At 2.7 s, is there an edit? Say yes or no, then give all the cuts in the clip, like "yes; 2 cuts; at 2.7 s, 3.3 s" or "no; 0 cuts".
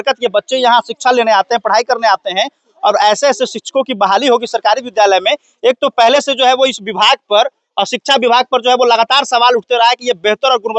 no; 0 cuts